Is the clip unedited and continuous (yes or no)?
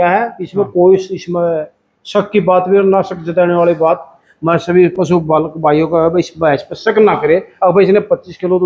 yes